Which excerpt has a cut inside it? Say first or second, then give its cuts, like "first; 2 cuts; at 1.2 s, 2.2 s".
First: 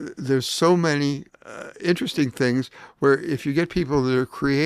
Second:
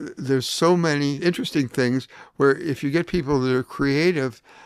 second; 1 cut; at 1.2 s